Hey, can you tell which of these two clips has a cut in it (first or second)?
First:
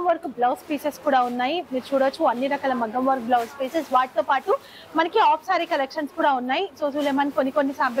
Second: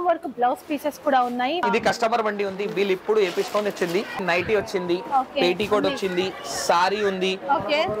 second